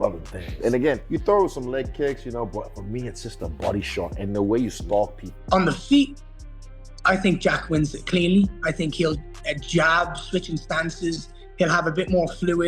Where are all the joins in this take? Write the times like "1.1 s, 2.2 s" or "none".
5.3 s